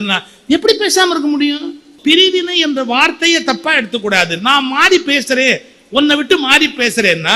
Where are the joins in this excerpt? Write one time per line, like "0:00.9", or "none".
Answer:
0:01.9